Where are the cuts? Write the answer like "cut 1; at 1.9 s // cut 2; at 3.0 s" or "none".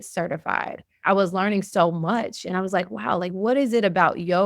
cut 1; at 1.0 s